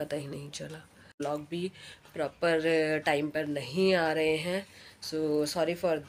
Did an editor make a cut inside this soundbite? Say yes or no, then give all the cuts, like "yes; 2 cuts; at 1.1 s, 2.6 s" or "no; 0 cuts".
yes; 1 cut; at 1.2 s